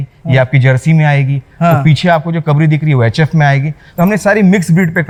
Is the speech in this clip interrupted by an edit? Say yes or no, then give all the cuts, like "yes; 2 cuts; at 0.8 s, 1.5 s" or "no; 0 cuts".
no; 0 cuts